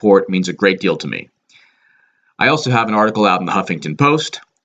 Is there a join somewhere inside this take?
yes; 1 cut; at 2.8 s

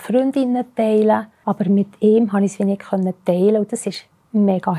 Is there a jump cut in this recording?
yes; 1 cut; at 1.4 s

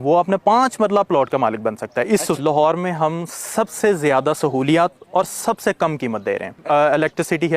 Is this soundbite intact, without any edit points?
no; 2 cuts; at 2.4 s, 6.6 s

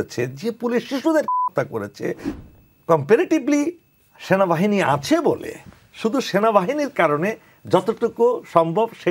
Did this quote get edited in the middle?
yes; 1 cut; at 2.3 s

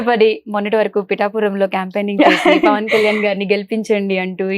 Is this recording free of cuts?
yes; 0 cuts

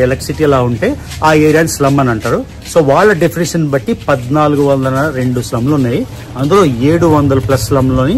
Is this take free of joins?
yes; 0 cuts

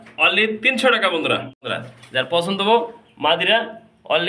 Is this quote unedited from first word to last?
no; 1 cut; at 1.7 s

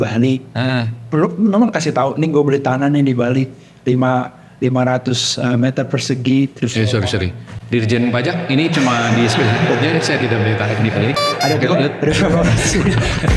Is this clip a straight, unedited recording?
yes; 0 cuts

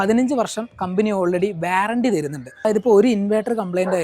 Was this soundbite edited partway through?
yes; 1 cut; at 2.6 s

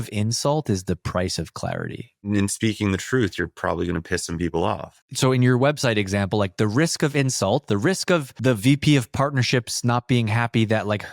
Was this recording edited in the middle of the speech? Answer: yes; 2 cuts; at 2.2 s, 8.3 s

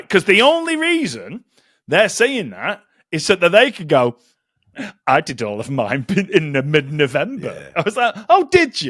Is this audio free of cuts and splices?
yes; 0 cuts

